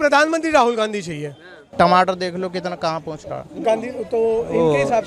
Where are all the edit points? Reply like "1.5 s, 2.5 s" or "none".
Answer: 1.7 s

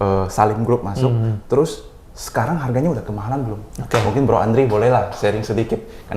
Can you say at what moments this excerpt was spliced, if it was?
none

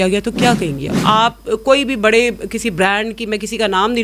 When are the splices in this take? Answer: 0.9 s

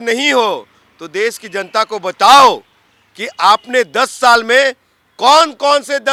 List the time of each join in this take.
none

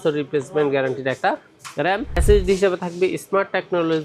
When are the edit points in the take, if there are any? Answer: 2.2 s

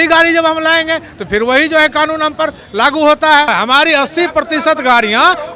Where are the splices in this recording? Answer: 3.5 s

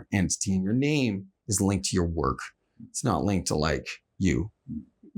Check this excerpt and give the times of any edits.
4.0 s

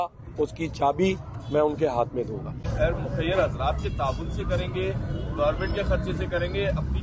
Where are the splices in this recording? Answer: 2.7 s

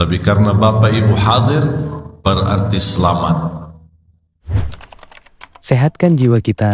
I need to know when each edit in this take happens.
4.4 s

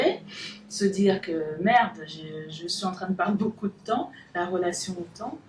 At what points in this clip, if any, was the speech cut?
none

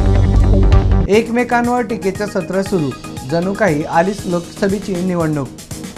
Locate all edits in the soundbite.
none

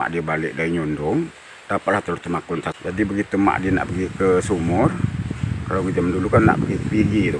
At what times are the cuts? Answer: 2.8 s

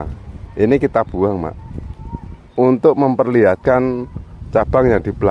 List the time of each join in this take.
none

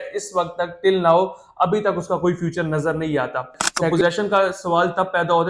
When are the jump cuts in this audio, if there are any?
3.9 s

